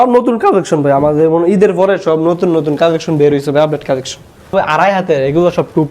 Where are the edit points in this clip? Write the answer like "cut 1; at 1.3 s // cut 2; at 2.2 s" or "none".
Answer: cut 1; at 4.5 s